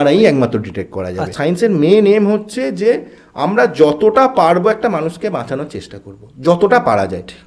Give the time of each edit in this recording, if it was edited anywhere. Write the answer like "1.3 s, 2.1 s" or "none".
1.2 s